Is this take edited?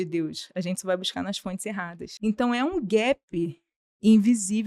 yes; 1 cut; at 2.0 s

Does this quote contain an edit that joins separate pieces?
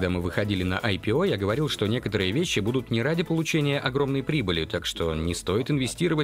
no; 0 cuts

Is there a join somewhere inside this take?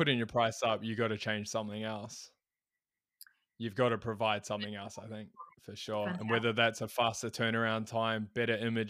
no; 0 cuts

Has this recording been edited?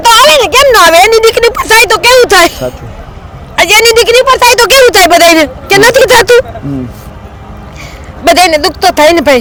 no; 0 cuts

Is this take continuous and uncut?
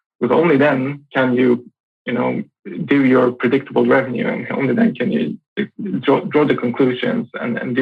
yes; 0 cuts

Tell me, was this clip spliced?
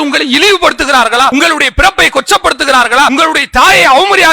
yes; 2 cuts; at 1.3 s, 3.1 s

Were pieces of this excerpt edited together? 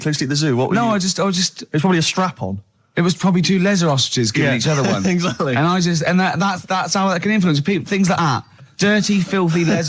no; 0 cuts

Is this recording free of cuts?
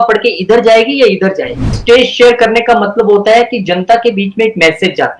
no; 1 cut; at 1.7 s

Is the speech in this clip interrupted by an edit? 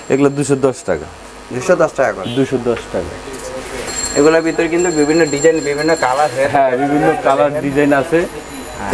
no; 0 cuts

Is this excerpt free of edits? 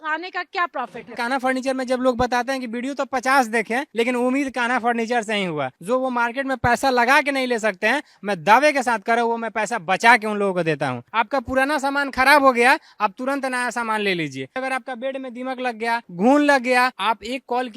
no; 6 cuts; at 1.2 s, 5.7 s, 11.0 s, 14.6 s, 16.1 s, 17.0 s

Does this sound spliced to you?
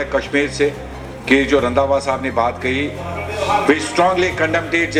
no; 0 cuts

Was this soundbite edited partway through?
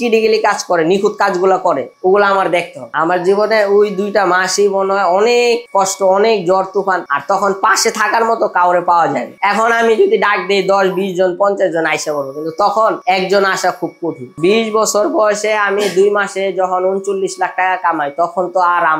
yes; 1 cut; at 2.8 s

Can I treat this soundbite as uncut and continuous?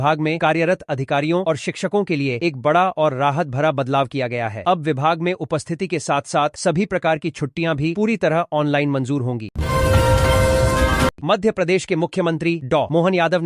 yes; 0 cuts

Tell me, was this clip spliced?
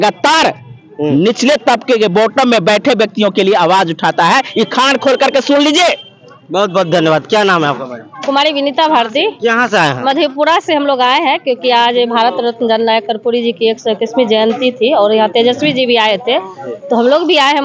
no; 0 cuts

